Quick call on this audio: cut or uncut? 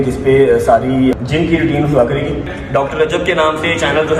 cut